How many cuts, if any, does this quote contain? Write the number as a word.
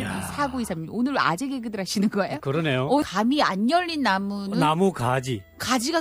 one